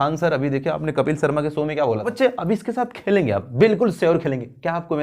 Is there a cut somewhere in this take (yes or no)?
yes